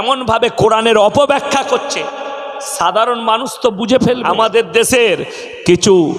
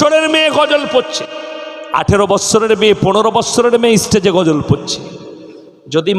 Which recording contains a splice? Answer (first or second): first